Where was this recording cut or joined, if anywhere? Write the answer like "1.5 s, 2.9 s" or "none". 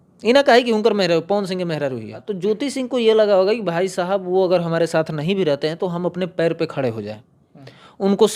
2.2 s